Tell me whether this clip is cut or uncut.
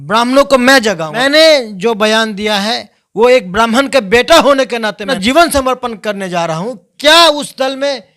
cut